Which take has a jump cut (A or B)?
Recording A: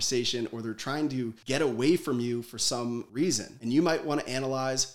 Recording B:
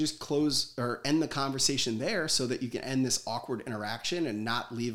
A